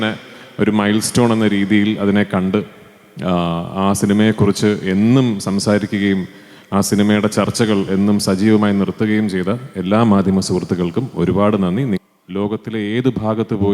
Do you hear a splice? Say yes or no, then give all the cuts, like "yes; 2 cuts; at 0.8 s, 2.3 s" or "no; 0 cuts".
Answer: yes; 1 cut; at 12.0 s